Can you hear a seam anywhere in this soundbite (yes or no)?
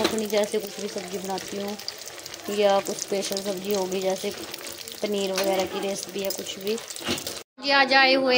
yes